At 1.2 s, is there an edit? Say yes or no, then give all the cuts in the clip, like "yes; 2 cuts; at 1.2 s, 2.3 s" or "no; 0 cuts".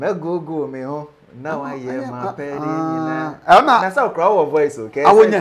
no; 0 cuts